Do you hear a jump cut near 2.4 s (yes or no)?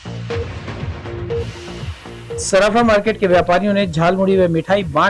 yes